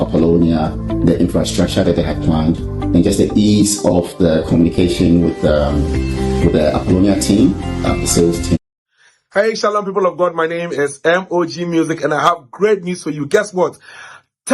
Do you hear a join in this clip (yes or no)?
yes